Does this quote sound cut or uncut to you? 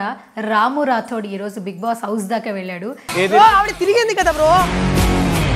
uncut